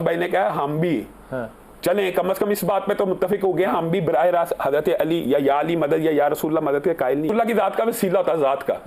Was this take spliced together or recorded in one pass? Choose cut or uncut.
cut